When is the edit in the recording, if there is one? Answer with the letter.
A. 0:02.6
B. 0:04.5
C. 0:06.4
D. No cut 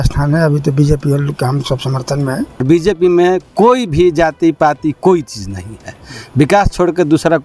A